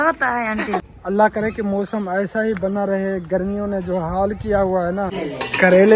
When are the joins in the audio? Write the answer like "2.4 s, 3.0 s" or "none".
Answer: 0.9 s, 5.2 s